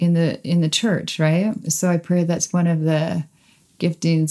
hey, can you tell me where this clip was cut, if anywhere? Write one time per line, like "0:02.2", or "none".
0:01.7